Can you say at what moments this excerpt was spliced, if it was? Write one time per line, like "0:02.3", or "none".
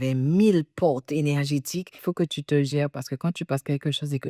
0:02.0